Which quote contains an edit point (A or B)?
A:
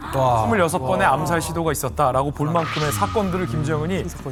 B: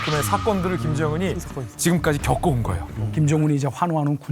B